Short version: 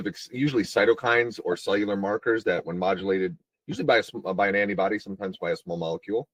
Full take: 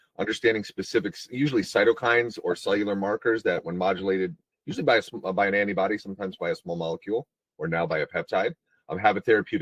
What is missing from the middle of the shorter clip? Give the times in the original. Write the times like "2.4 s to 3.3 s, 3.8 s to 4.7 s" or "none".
none